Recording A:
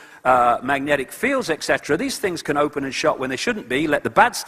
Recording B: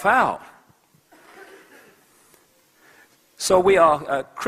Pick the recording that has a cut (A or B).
A